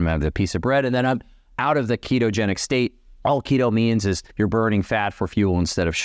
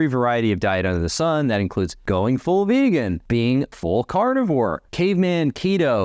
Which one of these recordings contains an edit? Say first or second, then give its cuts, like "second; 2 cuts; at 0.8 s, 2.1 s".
second; 3 cuts; at 2.0 s, 3.6 s, 4.8 s